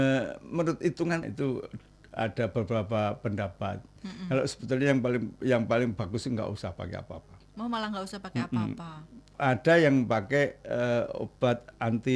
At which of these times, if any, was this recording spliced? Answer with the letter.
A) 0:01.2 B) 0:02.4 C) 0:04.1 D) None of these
A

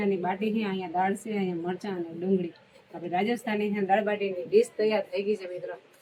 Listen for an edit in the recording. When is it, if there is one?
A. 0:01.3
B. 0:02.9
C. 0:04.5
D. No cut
D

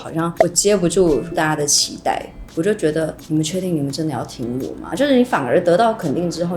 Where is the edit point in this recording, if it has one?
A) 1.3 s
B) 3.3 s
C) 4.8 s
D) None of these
C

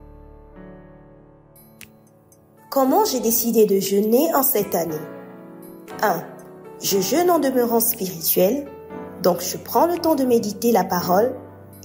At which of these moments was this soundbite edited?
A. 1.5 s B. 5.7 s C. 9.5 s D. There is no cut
A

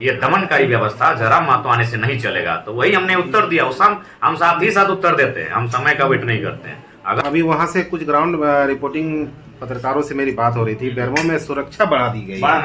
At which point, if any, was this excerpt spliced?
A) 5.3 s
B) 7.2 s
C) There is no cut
B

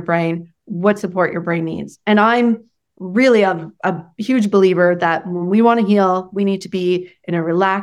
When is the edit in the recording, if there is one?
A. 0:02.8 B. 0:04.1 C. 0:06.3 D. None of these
D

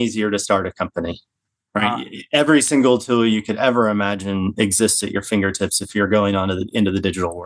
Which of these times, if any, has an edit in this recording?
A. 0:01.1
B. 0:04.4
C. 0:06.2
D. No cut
D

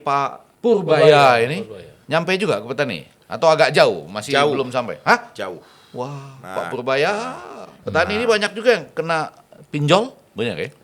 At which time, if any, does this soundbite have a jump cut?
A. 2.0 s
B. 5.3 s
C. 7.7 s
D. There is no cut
C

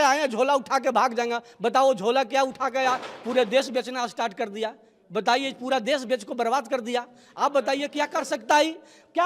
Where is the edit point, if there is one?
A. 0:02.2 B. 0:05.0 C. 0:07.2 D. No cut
D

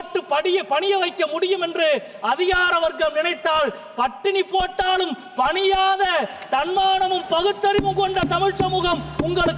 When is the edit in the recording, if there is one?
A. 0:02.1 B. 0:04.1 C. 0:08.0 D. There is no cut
D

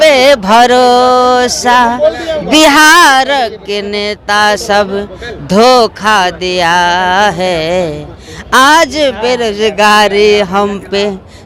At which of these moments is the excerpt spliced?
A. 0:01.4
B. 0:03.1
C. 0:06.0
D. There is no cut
D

